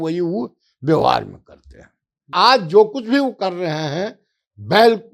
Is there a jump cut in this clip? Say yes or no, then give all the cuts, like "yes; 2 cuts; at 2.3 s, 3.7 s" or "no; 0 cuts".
yes; 1 cut; at 2.2 s